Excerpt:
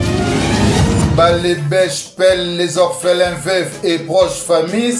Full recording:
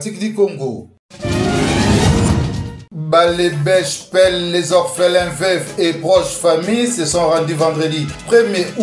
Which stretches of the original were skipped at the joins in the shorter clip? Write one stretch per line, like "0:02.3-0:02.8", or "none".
0:02.4-0:03.1